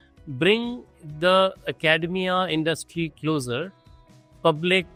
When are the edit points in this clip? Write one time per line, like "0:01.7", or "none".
none